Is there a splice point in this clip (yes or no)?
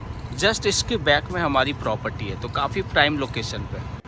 no